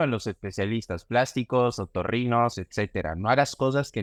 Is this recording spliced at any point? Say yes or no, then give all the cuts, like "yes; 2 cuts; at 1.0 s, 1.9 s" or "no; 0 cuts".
no; 0 cuts